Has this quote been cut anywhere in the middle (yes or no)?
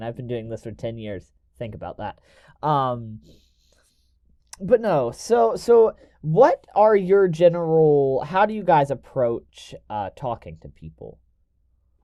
no